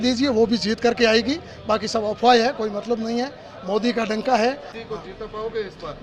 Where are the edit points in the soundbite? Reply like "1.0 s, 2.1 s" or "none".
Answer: 4.7 s